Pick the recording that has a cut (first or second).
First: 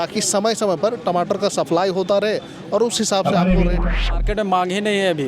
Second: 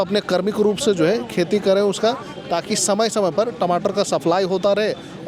first